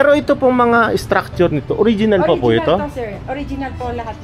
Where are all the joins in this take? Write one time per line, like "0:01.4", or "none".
none